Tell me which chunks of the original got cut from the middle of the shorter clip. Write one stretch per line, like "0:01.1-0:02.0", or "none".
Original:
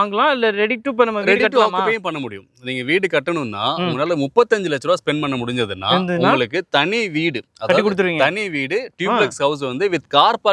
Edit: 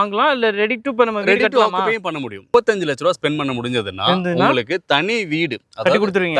0:02.5-0:04.3